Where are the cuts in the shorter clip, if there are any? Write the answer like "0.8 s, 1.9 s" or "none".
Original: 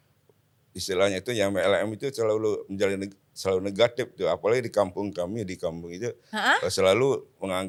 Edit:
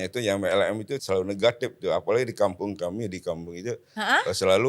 0.9 s